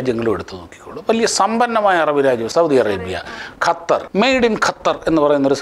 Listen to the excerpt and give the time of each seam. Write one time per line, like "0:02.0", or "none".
0:02.5
0:04.1